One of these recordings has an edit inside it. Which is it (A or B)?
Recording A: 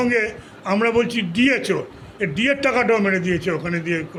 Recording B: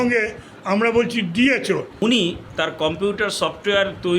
B